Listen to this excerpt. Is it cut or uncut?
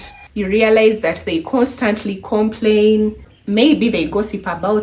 uncut